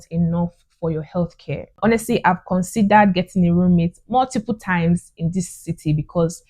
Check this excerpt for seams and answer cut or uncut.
cut